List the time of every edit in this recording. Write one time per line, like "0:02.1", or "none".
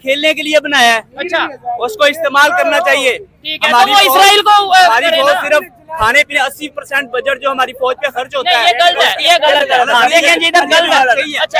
none